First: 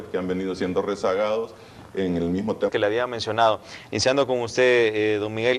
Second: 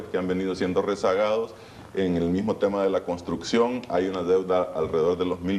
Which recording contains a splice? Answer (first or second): second